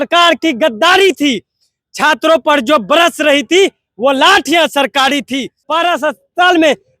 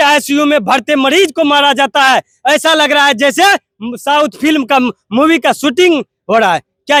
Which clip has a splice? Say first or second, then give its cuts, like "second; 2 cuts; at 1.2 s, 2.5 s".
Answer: first; 1 cut; at 5.6 s